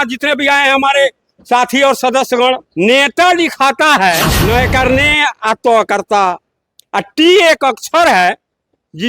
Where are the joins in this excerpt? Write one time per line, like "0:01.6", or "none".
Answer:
0:02.7
0:04.3